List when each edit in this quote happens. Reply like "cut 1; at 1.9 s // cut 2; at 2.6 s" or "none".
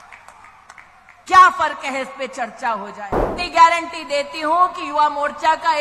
cut 1; at 3.3 s